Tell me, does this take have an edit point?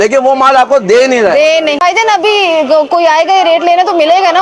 yes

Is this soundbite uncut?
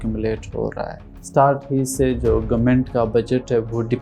no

